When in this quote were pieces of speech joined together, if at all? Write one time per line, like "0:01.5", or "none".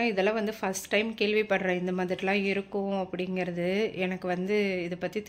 none